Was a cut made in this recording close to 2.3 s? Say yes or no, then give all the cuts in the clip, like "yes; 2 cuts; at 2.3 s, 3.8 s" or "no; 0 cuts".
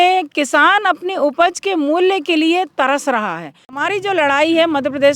no; 1 cut; at 3.8 s